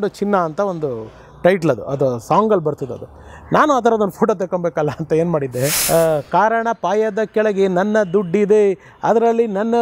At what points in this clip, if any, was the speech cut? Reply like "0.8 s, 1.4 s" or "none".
5.8 s